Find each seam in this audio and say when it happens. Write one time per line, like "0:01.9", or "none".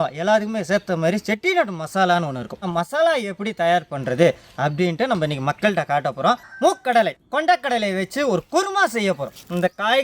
0:02.6
0:06.5